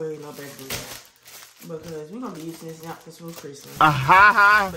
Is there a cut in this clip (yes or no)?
yes